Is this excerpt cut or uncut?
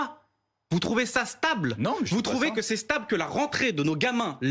uncut